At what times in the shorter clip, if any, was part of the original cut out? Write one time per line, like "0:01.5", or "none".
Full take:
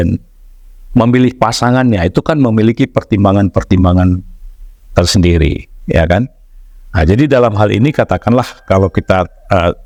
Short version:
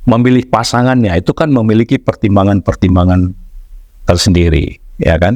none